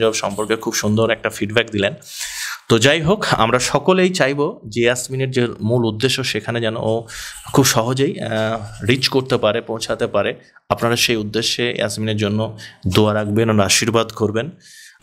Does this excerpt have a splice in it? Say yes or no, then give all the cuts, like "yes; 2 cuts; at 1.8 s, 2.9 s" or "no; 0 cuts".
no; 0 cuts